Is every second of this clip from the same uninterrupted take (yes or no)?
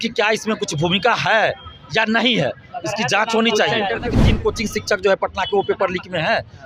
no